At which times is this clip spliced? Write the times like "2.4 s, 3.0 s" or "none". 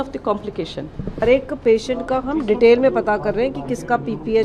1.2 s